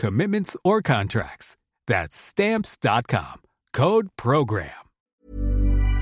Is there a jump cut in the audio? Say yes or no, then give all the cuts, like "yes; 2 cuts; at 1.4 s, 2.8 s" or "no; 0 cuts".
yes; 1 cut; at 5.1 s